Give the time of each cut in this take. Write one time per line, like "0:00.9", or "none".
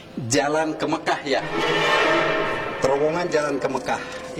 none